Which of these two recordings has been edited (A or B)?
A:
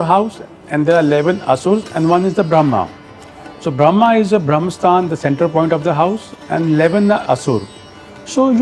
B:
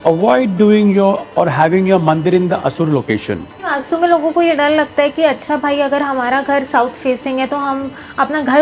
B